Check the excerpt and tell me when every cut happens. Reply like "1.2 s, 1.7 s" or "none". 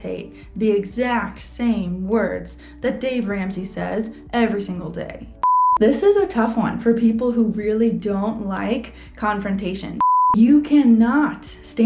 5.4 s, 10.4 s